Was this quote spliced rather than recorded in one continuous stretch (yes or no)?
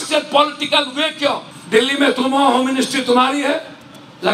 yes